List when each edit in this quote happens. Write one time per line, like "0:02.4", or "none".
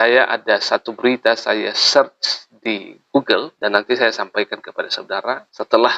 none